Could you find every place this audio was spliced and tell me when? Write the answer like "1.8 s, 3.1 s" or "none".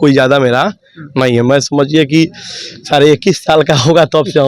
none